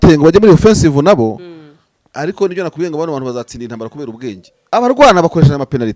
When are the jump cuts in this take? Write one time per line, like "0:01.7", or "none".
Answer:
0:04.5